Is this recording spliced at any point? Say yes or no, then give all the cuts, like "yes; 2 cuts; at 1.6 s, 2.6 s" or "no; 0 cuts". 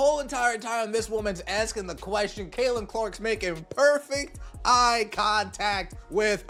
no; 0 cuts